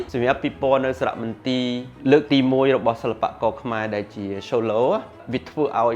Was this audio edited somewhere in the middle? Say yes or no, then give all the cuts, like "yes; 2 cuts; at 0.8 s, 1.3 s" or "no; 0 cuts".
yes; 1 cut; at 1.9 s